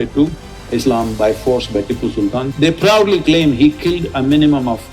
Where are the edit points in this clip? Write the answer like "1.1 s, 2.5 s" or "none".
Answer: 2.5 s